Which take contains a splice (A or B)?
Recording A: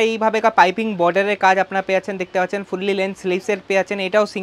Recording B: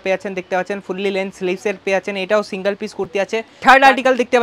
B